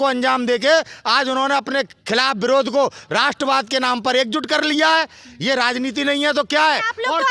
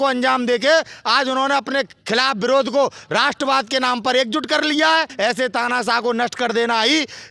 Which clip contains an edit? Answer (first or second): second